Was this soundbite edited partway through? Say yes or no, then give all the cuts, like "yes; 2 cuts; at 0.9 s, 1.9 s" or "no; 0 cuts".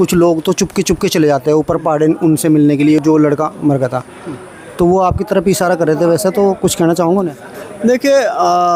no; 0 cuts